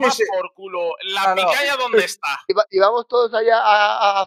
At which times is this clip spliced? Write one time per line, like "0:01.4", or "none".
0:02.5